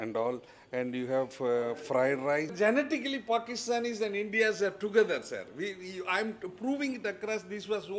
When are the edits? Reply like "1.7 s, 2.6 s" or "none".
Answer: 2.5 s